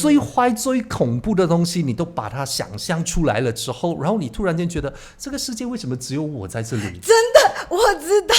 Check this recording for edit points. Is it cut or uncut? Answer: uncut